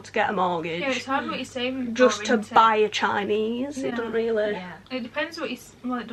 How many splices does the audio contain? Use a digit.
0